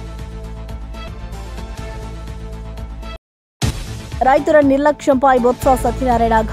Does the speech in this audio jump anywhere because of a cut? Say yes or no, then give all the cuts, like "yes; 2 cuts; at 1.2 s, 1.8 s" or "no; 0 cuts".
yes; 2 cuts; at 1.1 s, 3.1 s